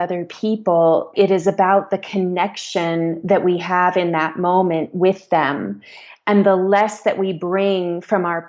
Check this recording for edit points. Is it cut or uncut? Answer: cut